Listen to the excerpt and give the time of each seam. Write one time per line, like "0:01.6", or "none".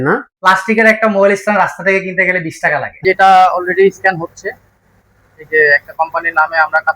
0:02.9